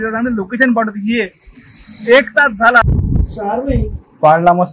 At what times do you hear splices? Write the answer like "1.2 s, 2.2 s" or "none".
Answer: 2.8 s